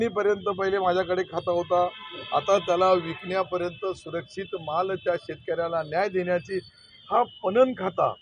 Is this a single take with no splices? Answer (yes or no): yes